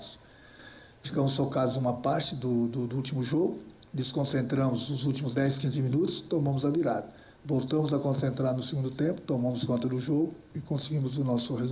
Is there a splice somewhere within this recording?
no; 0 cuts

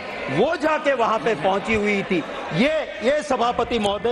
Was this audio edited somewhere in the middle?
no; 0 cuts

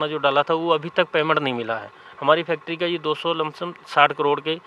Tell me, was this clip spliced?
no; 0 cuts

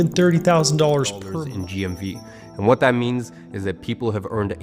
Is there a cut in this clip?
yes; 1 cut; at 1.2 s

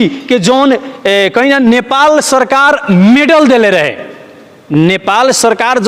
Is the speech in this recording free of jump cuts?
yes; 0 cuts

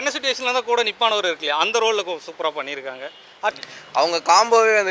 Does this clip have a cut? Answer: yes; 1 cut; at 3.6 s

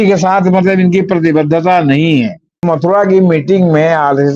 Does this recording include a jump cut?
yes; 1 cut; at 2.6 s

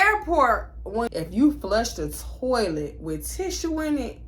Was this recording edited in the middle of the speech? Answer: yes; 1 cut; at 1.1 s

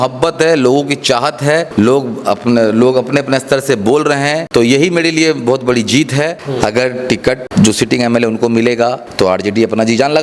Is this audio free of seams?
no; 5 cuts; at 1.7 s, 4.4 s, 6.4 s, 7.4 s, 9.0 s

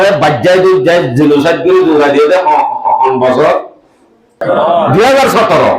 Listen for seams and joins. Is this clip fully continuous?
no; 1 cut; at 4.3 s

